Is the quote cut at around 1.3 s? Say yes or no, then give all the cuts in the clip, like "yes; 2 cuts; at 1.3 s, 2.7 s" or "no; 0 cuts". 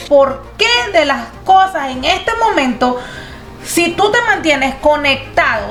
no; 0 cuts